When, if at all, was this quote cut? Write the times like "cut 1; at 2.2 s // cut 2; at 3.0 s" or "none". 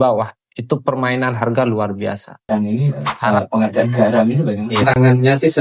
cut 1; at 2.5 s // cut 2; at 4.7 s